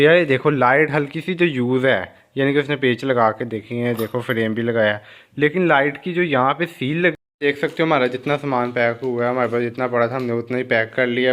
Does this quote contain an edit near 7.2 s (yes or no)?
yes